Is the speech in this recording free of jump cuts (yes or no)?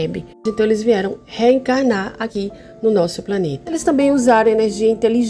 no